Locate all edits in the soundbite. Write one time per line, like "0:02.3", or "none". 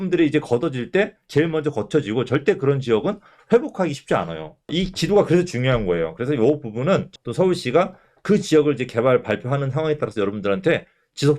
0:07.1

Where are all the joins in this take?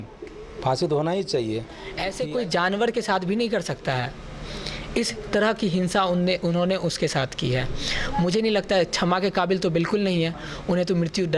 0:01.6

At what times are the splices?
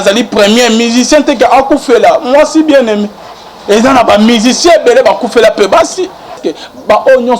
0:06.5

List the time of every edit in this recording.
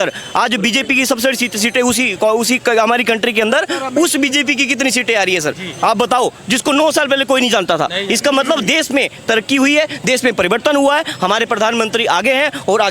none

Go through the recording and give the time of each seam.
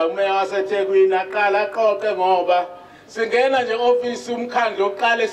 none

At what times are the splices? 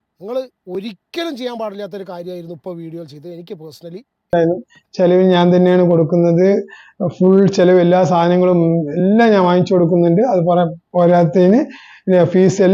0:04.3

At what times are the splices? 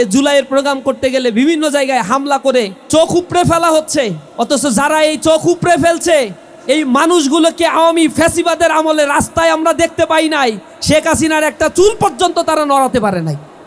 0:02.8
0:04.2

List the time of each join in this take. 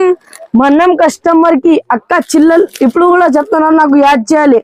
none

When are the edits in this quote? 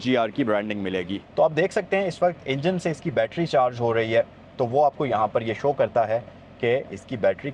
0:01.2

